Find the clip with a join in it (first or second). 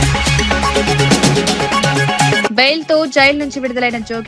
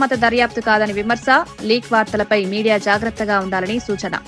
first